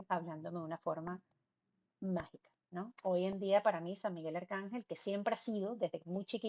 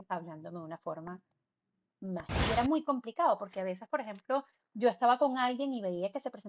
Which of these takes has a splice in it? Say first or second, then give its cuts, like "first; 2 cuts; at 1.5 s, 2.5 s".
second; 1 cut; at 2.5 s